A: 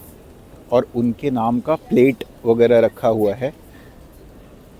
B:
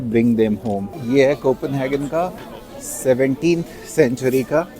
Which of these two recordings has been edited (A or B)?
B